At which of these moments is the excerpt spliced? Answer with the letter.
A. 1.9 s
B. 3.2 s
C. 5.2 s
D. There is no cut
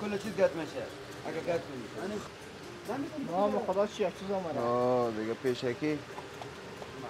D